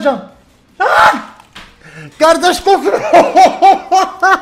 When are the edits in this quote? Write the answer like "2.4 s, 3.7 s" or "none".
none